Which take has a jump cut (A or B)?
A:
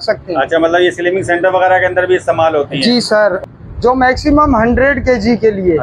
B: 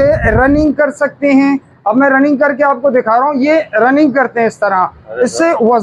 A